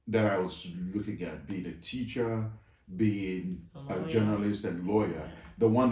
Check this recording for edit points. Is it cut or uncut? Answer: uncut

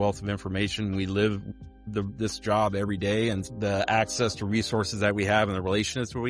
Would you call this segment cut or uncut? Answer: cut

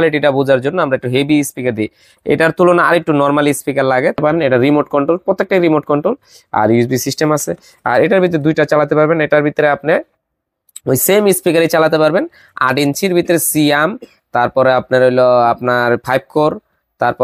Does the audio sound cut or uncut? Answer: cut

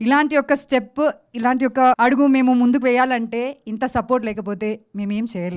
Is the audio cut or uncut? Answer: cut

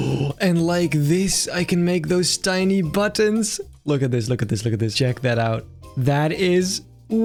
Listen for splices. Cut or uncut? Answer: uncut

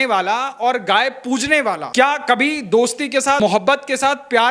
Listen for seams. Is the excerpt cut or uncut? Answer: cut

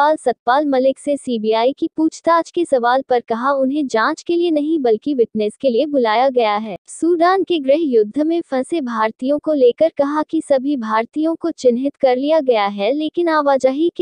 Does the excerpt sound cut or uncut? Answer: cut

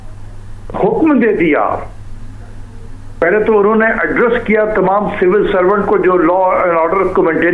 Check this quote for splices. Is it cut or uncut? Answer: uncut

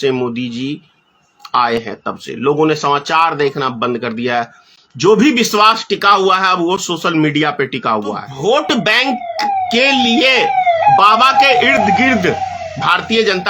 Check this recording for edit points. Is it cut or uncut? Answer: cut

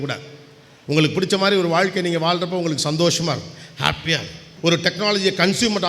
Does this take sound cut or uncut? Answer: cut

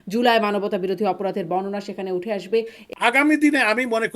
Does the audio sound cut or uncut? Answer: cut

